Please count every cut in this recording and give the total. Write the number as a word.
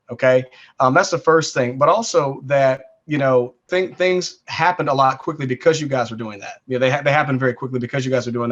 one